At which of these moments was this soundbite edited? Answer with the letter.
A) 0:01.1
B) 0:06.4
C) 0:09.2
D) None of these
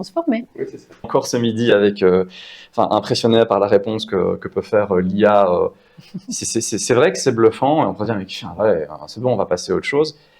A